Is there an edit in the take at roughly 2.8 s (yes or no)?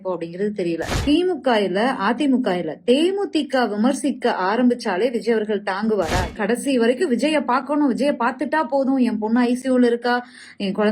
no